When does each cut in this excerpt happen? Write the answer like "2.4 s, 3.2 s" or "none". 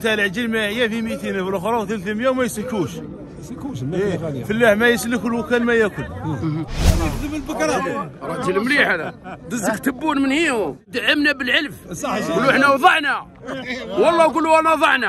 6.8 s, 10.9 s